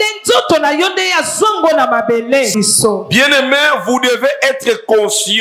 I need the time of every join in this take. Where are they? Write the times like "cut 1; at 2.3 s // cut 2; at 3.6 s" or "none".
cut 1; at 2.5 s